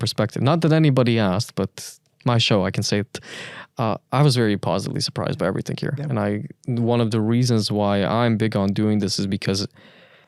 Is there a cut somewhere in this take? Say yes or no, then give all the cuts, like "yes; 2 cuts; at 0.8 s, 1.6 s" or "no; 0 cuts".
no; 0 cuts